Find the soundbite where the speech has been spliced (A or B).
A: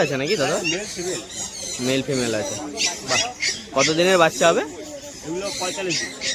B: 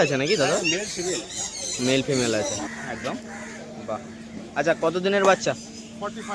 B